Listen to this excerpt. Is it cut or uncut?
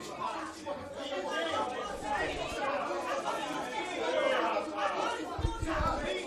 uncut